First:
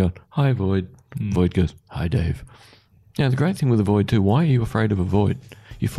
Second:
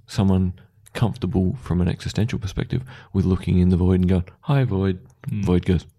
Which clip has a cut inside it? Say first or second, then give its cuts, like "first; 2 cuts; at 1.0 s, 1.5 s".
first; 1 cut; at 2.9 s